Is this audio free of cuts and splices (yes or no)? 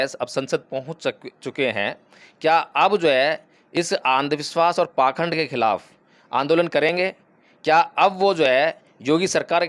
yes